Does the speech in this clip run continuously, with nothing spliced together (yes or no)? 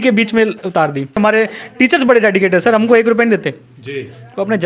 no